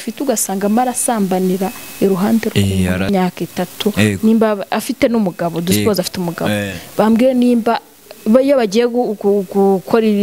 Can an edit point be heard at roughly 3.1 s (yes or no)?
yes